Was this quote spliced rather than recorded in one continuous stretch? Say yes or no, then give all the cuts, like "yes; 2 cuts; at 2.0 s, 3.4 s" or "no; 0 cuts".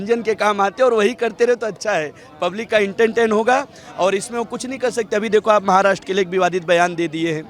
no; 0 cuts